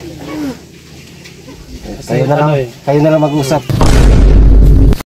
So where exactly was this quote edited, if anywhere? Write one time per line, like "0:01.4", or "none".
0:03.6